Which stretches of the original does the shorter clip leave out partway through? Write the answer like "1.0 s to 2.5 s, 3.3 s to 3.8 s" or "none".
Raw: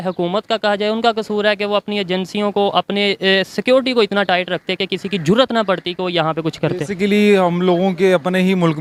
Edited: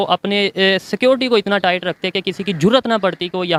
none